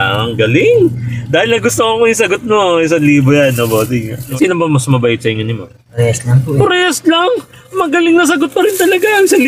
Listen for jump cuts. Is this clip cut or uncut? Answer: cut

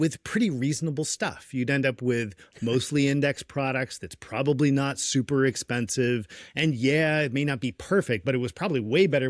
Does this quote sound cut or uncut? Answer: uncut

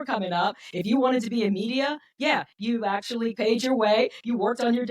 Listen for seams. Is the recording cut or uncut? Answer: cut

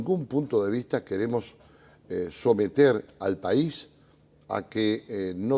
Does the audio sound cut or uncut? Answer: uncut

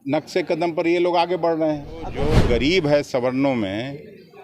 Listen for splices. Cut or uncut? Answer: cut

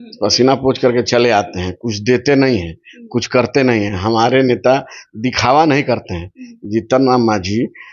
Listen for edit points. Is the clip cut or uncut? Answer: uncut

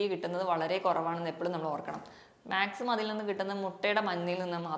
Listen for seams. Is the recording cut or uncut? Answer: uncut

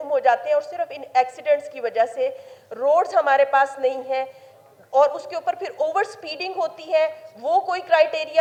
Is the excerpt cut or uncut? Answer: uncut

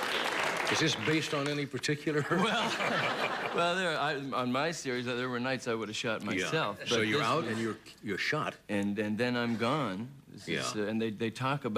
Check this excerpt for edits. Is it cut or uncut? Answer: uncut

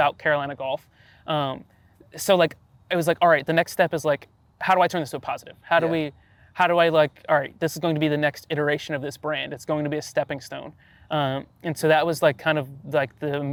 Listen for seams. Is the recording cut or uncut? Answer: uncut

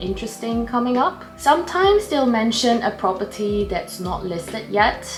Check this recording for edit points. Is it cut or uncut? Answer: uncut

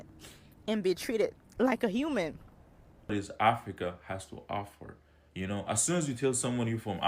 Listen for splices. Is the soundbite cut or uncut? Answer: cut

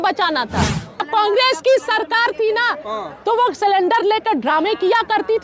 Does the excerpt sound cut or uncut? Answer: cut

